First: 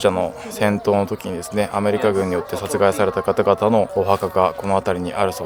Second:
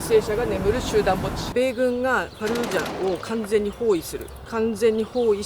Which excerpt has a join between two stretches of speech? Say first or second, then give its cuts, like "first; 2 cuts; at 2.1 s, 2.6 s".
second; 1 cut; at 1.4 s